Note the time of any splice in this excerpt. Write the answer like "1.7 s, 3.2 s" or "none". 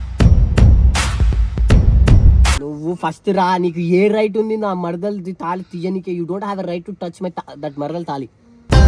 2.6 s